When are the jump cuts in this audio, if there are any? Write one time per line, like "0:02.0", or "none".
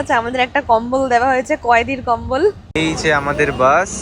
0:02.7